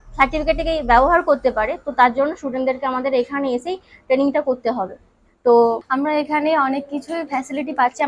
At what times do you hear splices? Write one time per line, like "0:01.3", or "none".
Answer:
0:05.8